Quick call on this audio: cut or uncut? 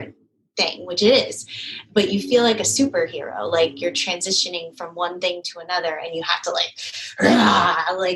uncut